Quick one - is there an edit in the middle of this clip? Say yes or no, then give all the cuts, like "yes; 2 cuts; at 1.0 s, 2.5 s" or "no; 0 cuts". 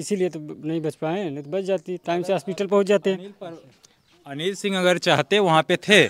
no; 0 cuts